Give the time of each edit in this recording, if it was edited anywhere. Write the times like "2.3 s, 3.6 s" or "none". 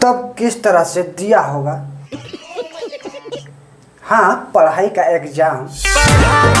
3.6 s, 5.7 s

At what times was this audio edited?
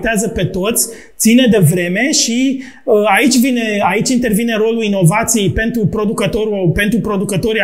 none

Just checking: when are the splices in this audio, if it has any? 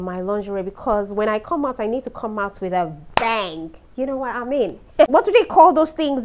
5.1 s

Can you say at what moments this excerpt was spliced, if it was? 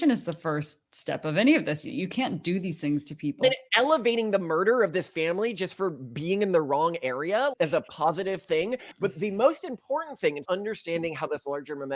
8.9 s

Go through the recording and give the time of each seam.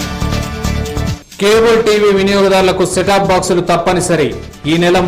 1.2 s

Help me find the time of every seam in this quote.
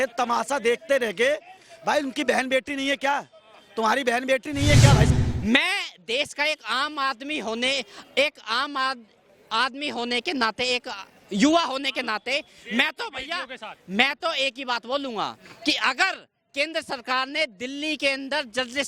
5.1 s

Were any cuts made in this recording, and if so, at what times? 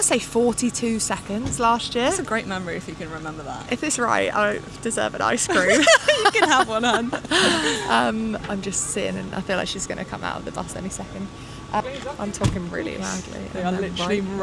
11.8 s

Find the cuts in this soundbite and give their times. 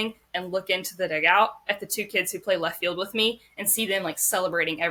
none

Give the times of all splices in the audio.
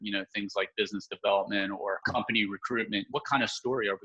2.0 s, 3.1 s

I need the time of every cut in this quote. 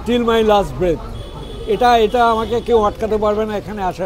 none

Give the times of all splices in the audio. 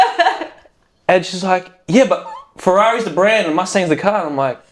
none

